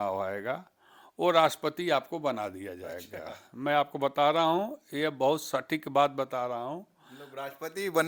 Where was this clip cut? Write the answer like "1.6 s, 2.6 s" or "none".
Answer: none